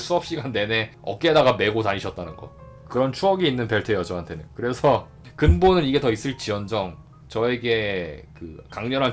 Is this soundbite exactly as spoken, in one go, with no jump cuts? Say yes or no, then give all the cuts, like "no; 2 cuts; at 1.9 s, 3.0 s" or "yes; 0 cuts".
no; 1 cut; at 1.0 s